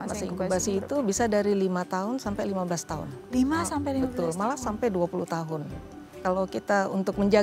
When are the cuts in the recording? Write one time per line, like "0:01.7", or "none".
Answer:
0:06.2